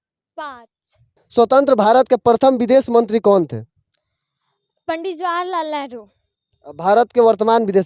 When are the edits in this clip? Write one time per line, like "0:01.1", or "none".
0:01.2